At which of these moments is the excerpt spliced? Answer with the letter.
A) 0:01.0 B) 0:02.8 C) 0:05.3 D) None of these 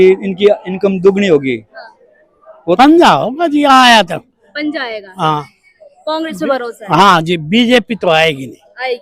B